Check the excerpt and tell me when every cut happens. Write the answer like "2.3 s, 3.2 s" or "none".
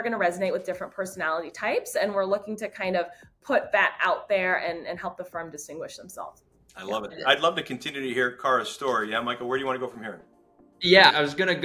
7.1 s